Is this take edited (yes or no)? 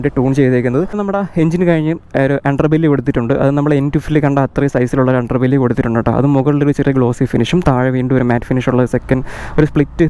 no